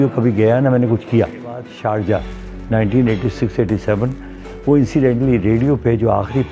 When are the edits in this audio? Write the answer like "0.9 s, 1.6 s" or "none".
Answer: 1.7 s